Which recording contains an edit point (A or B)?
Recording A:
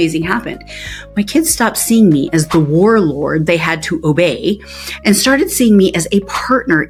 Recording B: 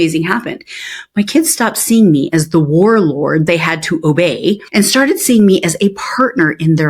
B